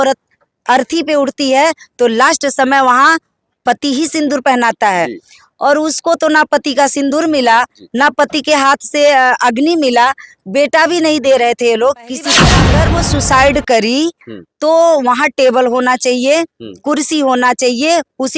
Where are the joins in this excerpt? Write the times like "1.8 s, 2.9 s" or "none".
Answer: 12.6 s